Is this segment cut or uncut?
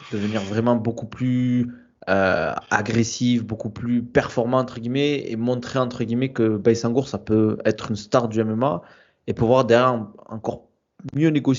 uncut